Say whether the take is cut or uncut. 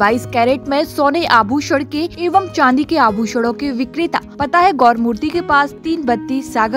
cut